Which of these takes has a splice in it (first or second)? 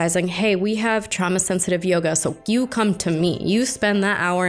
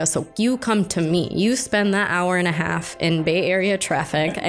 first